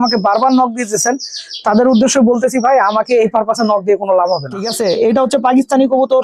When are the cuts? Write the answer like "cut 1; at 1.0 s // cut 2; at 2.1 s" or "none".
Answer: cut 1; at 4.7 s